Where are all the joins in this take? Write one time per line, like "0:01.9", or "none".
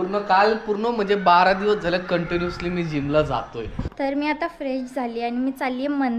0:03.8